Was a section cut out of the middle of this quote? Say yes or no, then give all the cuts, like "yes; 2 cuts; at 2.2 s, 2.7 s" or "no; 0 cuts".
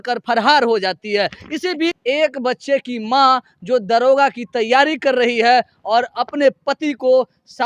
no; 0 cuts